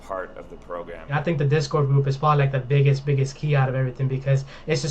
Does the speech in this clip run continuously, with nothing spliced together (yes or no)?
no